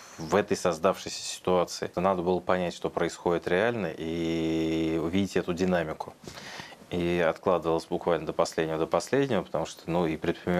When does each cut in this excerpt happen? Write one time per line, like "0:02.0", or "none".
0:01.9